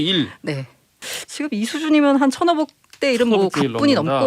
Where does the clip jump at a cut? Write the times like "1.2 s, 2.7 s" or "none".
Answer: 1.1 s